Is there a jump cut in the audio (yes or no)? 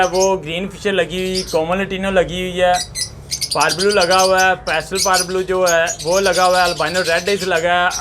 no